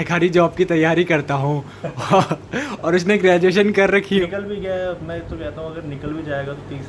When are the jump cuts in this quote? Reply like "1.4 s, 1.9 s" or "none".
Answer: 4.2 s